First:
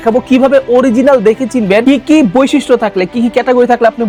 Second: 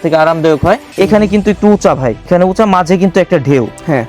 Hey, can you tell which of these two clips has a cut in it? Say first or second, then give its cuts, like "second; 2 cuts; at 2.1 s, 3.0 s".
second; 2 cuts; at 0.9 s, 2.3 s